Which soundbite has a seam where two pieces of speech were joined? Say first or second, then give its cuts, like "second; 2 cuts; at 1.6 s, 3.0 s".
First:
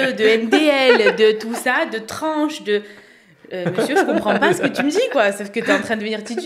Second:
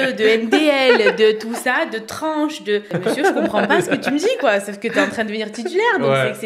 second; 1 cut; at 2.9 s